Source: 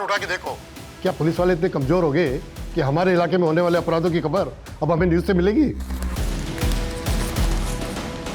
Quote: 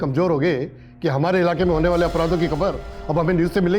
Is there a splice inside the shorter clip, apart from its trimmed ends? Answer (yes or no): no